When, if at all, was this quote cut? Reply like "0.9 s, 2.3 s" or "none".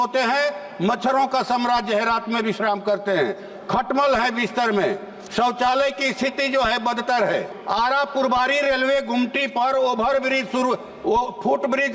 7.5 s